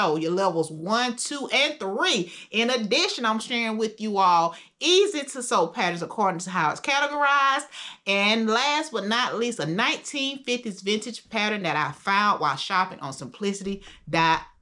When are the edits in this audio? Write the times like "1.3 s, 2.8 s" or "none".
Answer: none